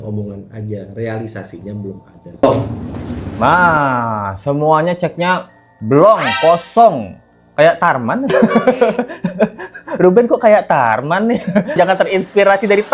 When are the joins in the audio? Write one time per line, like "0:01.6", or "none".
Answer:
0:02.4
0:11.8